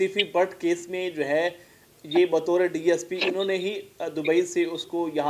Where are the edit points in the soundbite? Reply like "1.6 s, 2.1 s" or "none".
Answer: none